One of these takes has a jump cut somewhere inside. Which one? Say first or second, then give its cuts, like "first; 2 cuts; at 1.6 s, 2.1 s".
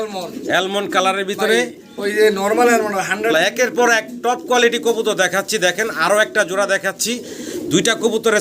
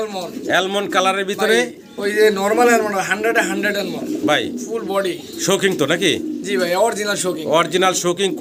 first; 1 cut; at 3.3 s